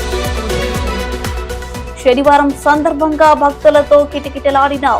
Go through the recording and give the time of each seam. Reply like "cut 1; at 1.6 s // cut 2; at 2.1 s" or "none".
cut 1; at 1.1 s